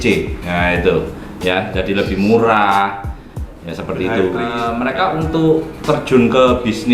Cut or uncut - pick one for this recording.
cut